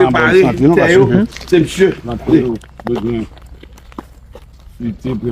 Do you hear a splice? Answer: yes; 1 cut; at 2.4 s

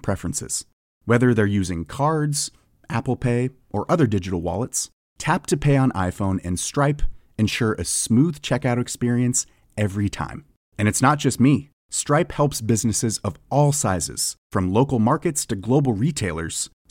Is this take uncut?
yes; 0 cuts

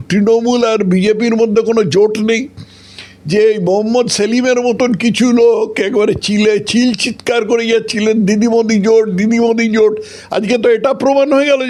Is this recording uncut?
yes; 0 cuts

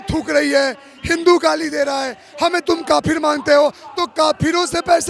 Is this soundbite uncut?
yes; 0 cuts

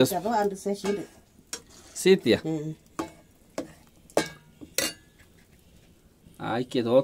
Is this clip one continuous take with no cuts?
yes; 0 cuts

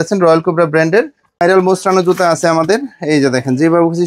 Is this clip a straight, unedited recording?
no; 1 cut; at 1.4 s

